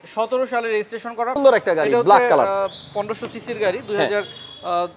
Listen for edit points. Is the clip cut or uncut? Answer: cut